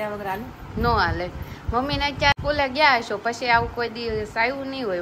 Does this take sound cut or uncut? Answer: cut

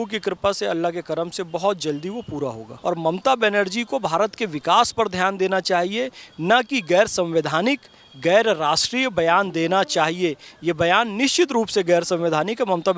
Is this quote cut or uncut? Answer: cut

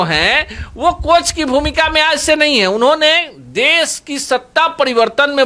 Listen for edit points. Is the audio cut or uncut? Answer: uncut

